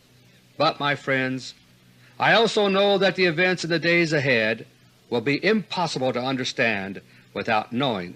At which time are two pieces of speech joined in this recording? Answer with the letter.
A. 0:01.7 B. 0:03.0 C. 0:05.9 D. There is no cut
C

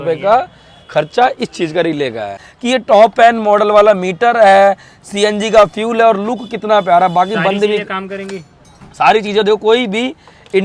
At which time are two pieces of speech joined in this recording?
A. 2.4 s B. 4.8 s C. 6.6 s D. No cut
A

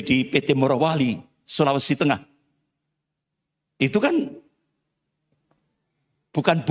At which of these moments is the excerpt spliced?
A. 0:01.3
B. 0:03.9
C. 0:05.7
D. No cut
D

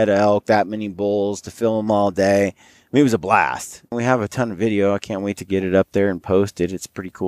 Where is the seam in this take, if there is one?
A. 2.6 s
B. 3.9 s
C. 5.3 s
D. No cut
B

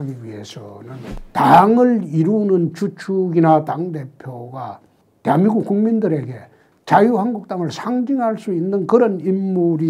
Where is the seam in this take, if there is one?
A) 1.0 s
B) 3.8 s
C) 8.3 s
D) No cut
A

